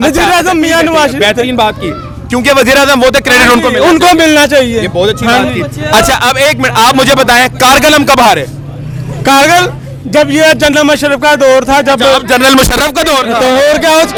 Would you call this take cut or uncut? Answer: uncut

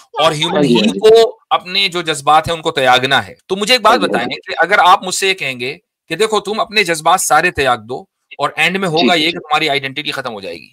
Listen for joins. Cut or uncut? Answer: cut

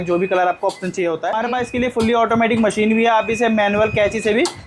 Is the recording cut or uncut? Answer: cut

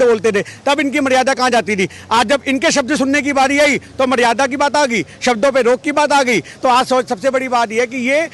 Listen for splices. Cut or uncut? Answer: uncut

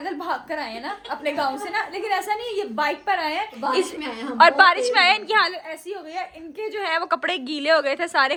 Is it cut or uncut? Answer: uncut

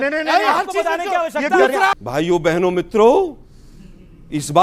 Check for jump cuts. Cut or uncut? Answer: cut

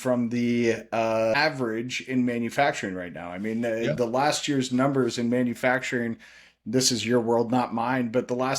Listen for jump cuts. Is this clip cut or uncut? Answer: cut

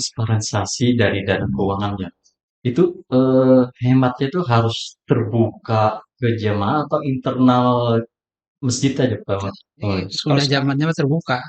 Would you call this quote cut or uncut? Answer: cut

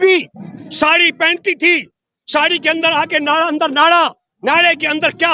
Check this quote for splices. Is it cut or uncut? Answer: uncut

